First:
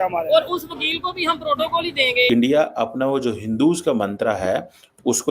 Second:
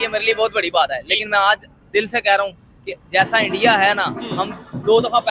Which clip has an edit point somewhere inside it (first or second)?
first